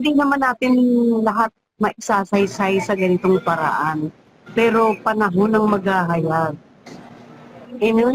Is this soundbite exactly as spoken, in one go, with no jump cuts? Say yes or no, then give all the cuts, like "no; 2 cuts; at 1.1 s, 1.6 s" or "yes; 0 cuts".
yes; 0 cuts